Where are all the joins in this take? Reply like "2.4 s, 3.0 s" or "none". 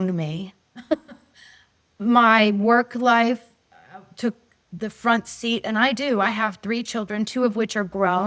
none